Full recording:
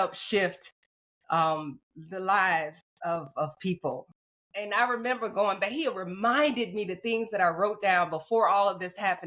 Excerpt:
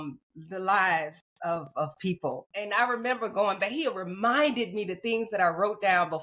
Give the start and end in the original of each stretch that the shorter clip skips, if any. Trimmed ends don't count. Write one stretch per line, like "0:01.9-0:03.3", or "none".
0:04.1-0:04.5